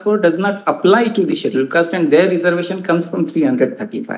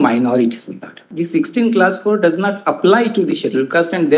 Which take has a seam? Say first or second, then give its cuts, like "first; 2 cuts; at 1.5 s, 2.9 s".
second; 1 cut; at 1.1 s